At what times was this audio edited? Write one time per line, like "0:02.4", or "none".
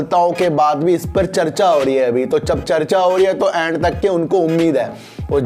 none